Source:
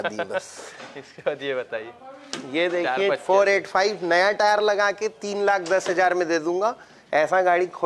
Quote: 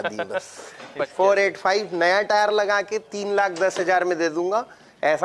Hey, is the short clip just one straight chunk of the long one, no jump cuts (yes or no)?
no